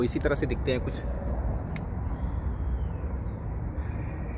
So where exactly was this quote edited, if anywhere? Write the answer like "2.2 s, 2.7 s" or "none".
none